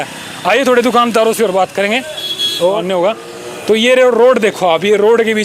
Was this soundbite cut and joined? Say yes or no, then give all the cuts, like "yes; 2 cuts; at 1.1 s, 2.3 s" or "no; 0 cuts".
yes; 1 cut; at 2.8 s